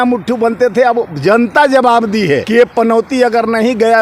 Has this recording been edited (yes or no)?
yes